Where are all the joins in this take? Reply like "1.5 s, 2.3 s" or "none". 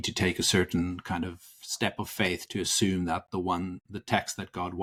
none